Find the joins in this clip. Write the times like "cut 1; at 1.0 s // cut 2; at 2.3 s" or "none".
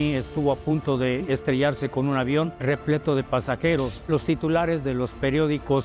cut 1; at 2.6 s // cut 2; at 4.0 s